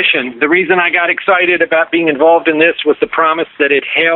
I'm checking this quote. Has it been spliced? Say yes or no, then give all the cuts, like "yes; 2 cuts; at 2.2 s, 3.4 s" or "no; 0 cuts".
no; 0 cuts